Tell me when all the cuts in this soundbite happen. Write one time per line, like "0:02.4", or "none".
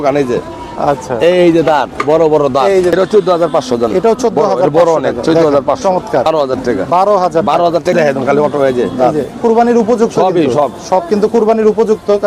0:02.9
0:06.3
0:07.9